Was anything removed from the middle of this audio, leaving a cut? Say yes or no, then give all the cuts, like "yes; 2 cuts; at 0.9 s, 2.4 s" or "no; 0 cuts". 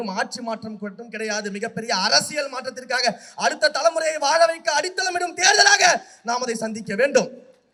no; 0 cuts